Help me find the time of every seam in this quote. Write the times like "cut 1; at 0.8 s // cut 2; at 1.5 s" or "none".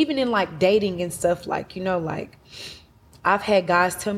none